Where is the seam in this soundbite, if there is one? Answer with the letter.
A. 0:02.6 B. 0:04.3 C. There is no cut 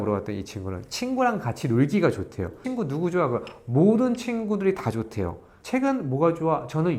A